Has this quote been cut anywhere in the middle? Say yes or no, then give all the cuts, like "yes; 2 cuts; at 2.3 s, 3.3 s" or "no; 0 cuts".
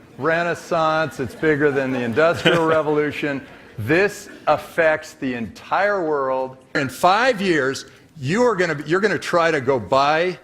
yes; 1 cut; at 6.8 s